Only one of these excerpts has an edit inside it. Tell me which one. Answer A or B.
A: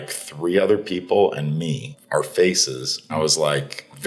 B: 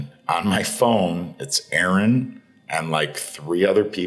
A